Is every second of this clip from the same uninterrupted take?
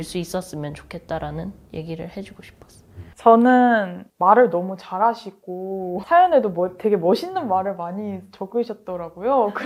yes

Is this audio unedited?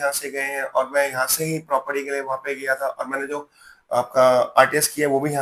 yes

